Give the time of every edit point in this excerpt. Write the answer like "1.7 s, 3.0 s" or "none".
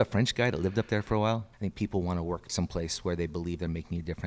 1.5 s, 2.5 s